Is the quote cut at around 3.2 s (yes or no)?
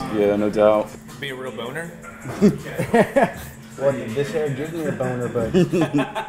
no